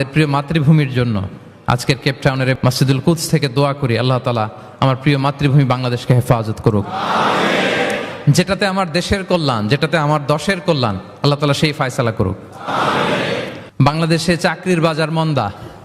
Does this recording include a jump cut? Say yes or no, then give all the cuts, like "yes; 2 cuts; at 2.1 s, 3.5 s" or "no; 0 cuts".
yes; 2 cuts; at 2.6 s, 13.6 s